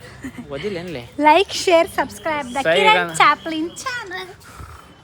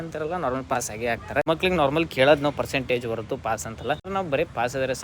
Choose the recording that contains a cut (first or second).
second